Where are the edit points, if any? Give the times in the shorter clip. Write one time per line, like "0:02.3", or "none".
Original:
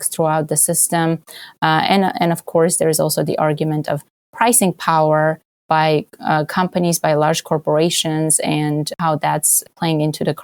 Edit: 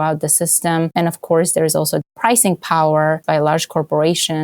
0:00.9
0:02.1
0:03.2

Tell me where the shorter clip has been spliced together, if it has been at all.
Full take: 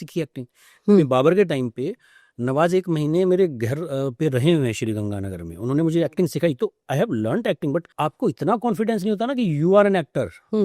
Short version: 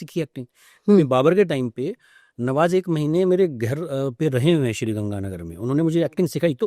none

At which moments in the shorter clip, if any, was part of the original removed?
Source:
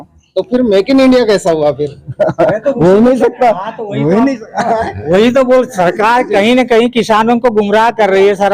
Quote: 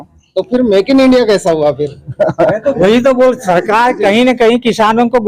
0:02.8

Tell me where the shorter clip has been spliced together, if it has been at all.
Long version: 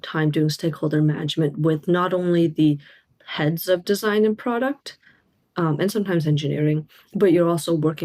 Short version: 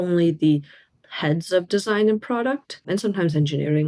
0:02.9

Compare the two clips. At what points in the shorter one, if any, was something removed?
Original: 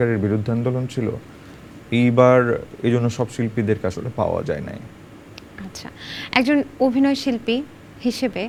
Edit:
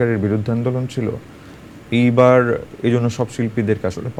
none

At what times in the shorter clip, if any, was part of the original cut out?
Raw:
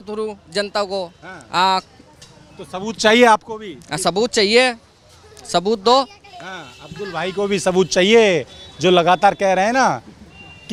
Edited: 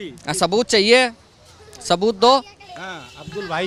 none

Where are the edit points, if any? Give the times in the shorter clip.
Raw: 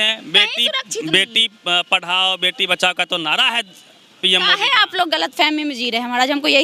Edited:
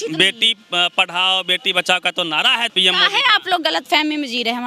0:02.7

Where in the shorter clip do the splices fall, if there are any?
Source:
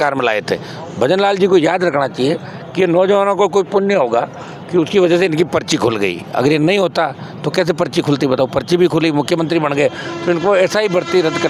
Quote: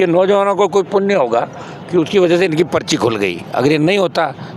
none

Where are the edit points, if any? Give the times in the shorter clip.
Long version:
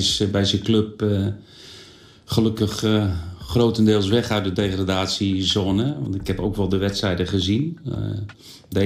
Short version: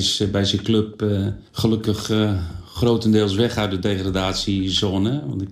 0:01.4

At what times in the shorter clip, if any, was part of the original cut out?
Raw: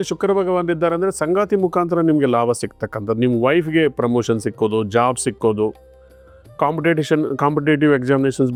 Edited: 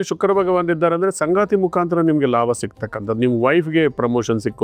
none

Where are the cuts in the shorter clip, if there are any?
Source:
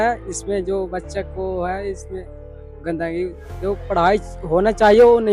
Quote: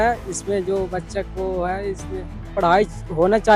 0:02.5

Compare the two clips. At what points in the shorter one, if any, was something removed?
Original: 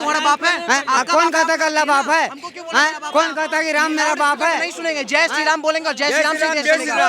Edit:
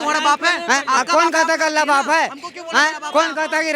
none

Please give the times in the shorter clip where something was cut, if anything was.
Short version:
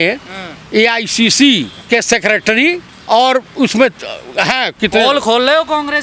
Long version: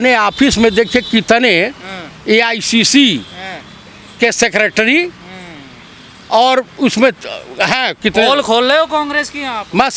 0:01.8
0:02.9

